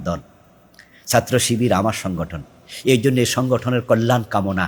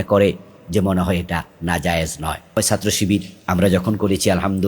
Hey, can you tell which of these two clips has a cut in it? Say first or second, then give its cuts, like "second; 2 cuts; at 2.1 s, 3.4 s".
second; 1 cut; at 2.6 s